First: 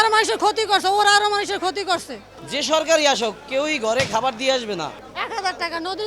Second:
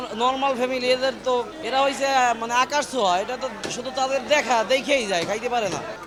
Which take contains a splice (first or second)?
first